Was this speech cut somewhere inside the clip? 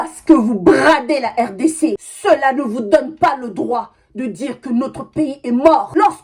yes; 1 cut; at 2.0 s

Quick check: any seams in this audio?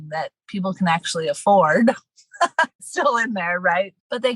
yes; 1 cut; at 2.8 s

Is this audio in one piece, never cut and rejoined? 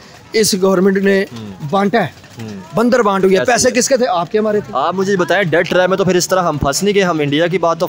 yes; 0 cuts

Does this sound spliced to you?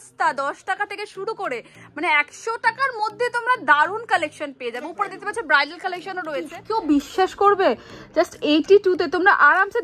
yes; 1 cut; at 6.6 s

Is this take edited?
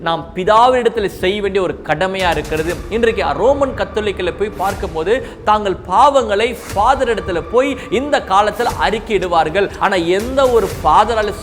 yes; 1 cut; at 9.7 s

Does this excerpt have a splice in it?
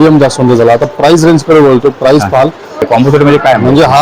yes; 1 cut; at 2.9 s

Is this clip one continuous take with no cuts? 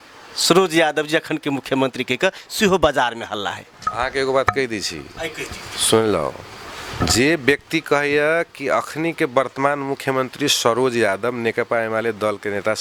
yes; 0 cuts

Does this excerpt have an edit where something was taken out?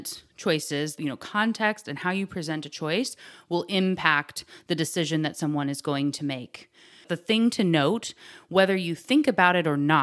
yes; 2 cuts; at 1.0 s, 7.1 s

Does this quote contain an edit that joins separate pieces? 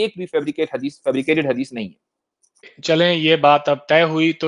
yes; 1 cut; at 2.7 s

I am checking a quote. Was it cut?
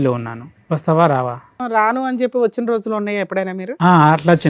yes; 1 cut; at 1.6 s

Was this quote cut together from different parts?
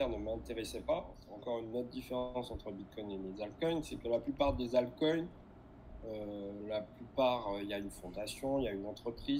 yes; 1 cut; at 1.2 s

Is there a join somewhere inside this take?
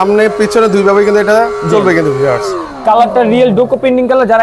no; 0 cuts

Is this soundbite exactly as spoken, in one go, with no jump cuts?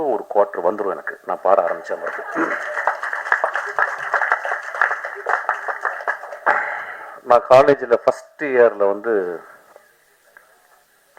yes; 0 cuts

